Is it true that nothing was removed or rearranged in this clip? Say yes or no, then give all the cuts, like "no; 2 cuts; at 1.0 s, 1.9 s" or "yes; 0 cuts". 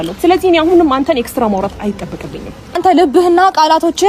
no; 1 cut; at 2.8 s